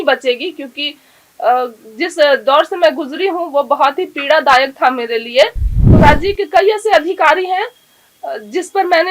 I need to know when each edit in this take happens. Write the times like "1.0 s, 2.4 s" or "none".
5.9 s